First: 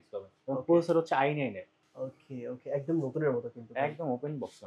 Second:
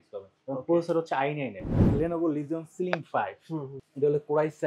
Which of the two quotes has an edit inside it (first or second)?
second